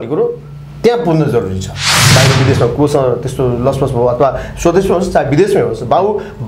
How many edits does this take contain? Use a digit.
1